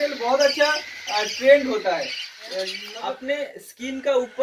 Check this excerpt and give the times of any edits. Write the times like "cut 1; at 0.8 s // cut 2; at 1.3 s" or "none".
cut 1; at 2.8 s